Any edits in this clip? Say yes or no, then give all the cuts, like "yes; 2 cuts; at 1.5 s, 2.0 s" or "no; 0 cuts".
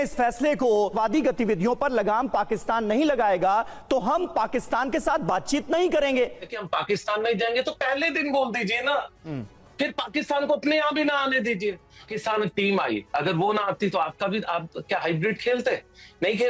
yes; 3 cuts; at 0.9 s, 6.6 s, 12.1 s